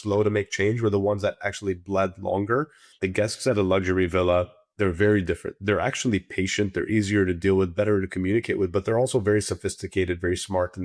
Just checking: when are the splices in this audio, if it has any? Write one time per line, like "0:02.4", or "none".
0:02.6